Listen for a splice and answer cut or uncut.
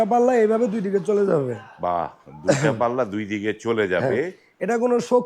uncut